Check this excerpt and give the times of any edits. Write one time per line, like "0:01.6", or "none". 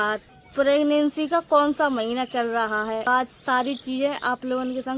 0:03.1